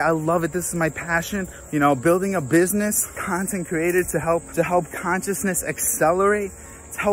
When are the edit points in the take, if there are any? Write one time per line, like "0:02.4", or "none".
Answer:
0:01.6
0:03.2
0:04.5